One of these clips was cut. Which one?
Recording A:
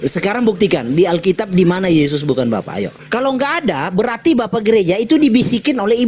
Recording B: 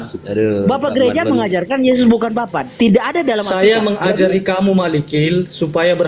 A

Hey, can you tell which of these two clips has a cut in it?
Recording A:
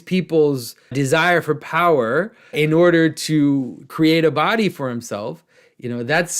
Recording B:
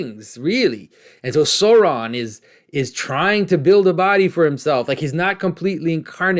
A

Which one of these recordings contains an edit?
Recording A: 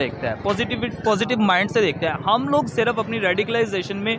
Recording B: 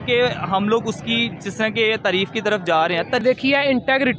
B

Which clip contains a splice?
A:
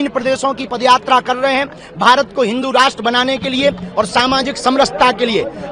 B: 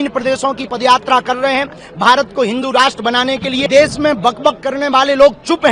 B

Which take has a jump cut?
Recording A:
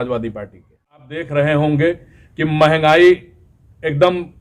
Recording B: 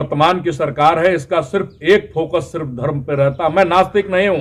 A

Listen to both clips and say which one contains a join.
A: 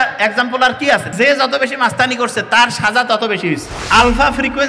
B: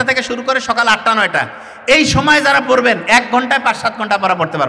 A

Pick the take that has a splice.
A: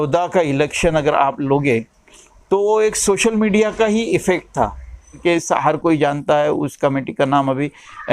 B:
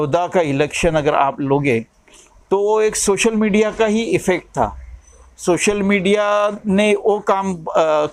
A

